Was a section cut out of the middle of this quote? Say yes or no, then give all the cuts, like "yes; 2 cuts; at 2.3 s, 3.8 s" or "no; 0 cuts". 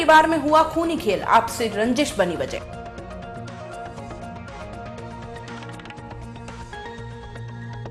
no; 0 cuts